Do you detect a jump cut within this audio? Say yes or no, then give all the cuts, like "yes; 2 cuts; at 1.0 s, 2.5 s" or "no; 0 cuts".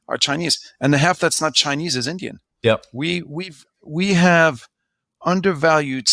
yes; 1 cut; at 2.5 s